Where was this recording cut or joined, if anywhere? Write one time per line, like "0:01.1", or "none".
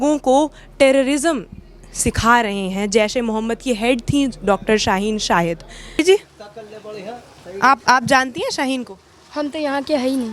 0:06.0